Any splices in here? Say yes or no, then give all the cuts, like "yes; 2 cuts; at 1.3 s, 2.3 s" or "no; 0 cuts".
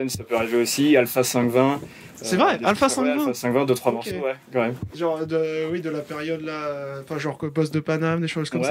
no; 0 cuts